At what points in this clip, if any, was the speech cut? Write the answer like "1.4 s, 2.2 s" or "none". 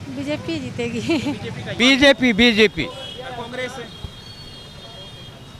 1.7 s